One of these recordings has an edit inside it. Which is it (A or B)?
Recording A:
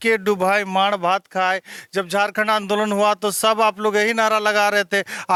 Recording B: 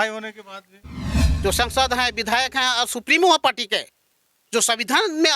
B